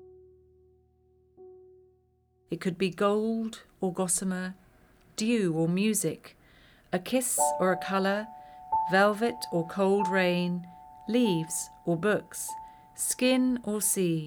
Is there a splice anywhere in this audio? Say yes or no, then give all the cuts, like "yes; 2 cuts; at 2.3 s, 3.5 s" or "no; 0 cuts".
yes; 1 cut; at 2.3 s